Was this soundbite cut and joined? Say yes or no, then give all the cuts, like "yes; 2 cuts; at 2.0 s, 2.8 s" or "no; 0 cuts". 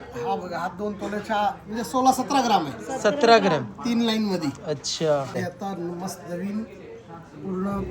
yes; 1 cut; at 5.4 s